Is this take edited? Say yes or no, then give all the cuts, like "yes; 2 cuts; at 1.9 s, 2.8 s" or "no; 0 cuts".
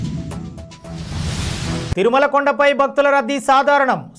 yes; 1 cut; at 1.9 s